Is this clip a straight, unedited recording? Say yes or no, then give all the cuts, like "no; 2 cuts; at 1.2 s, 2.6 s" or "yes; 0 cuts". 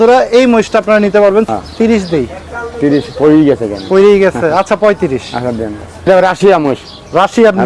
no; 2 cuts; at 1.5 s, 6.1 s